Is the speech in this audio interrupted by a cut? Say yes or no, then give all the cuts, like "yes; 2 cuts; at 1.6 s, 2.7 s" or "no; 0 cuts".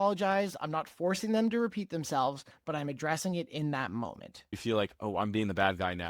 yes; 1 cut; at 4.6 s